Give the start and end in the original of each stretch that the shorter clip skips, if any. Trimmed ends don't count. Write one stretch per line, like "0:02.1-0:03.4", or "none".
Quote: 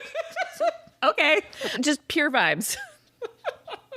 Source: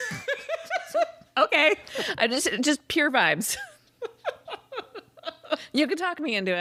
0:02.1-0:02.5